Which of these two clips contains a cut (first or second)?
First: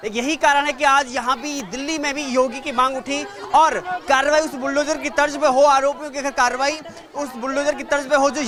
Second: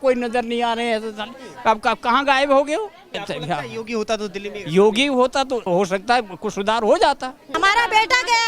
second